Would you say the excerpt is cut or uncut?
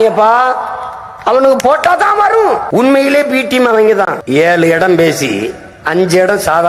cut